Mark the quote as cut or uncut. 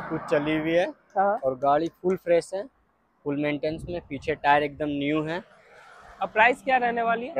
uncut